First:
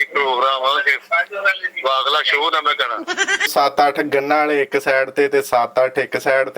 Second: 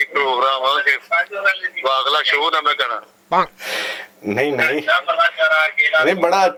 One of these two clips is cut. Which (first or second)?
first